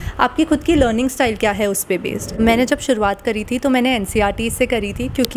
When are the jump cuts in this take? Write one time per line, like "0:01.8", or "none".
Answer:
0:02.4